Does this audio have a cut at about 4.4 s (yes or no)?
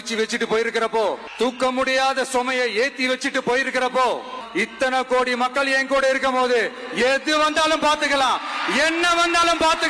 yes